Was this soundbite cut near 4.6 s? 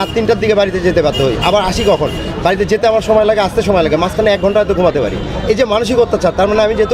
no; 0 cuts

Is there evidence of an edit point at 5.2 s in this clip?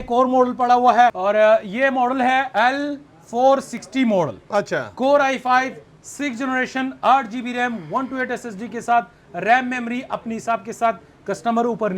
no; 2 cuts; at 1.2 s, 2.5 s

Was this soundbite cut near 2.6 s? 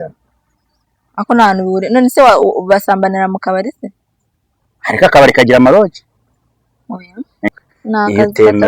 no; 1 cut; at 7.5 s

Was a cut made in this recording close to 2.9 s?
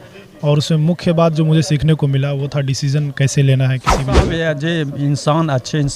no; 1 cut; at 4.3 s

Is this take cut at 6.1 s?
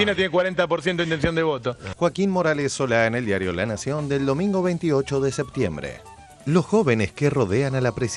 no; 0 cuts

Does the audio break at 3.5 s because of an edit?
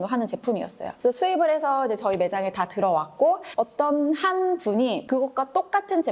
yes; 2 cuts; at 3.5 s, 5.0 s

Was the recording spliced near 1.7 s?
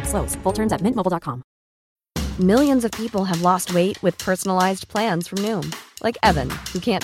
yes; 1 cut; at 1.7 s

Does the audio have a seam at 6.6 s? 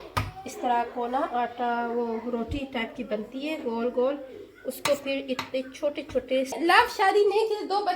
yes; 1 cut; at 6.6 s

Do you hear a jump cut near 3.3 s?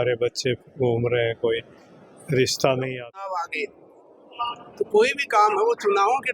yes; 1 cut; at 3.3 s

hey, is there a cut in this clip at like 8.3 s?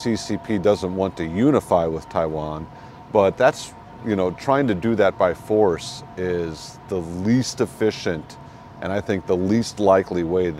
no; 0 cuts

